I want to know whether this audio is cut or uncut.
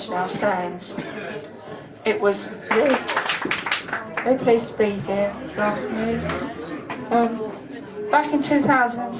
uncut